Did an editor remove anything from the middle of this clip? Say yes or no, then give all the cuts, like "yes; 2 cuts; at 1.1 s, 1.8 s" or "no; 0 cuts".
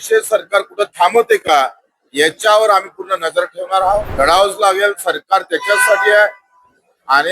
yes; 1 cut; at 4.1 s